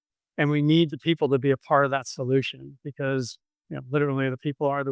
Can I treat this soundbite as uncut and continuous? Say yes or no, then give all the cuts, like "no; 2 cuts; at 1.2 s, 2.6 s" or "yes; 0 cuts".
yes; 0 cuts